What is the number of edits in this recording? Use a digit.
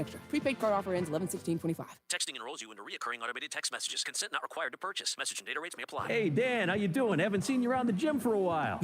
1